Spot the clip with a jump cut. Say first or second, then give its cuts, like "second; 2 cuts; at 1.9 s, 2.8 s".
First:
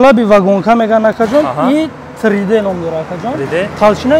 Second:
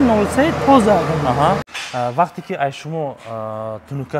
second; 1 cut; at 1.7 s